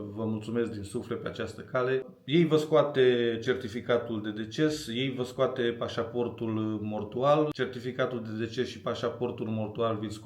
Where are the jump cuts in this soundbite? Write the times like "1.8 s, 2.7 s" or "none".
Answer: 2.1 s, 7.5 s